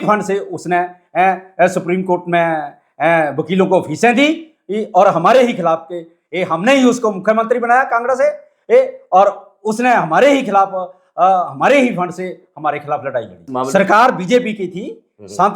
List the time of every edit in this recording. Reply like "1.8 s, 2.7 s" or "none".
13.4 s